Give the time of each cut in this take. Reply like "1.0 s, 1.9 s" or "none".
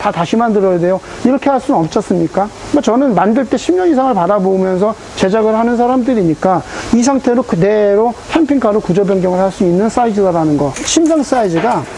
none

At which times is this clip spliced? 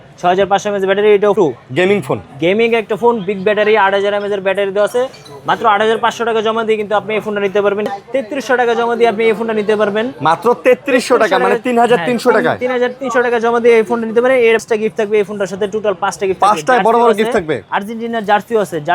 1.3 s, 7.9 s, 14.6 s

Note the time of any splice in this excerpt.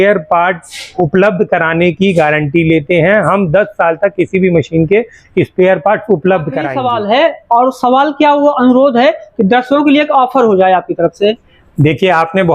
6.7 s

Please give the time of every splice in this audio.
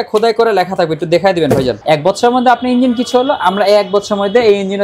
1.8 s

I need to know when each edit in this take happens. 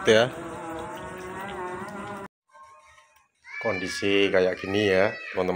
2.3 s

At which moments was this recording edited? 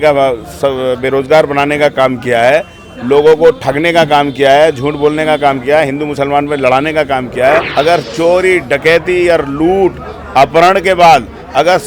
7.7 s

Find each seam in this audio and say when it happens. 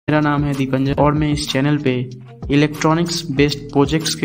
0.9 s

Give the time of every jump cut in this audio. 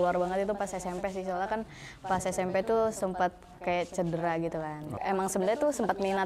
4.9 s

